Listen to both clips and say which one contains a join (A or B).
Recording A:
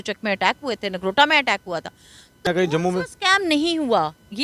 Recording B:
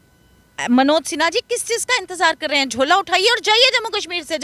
A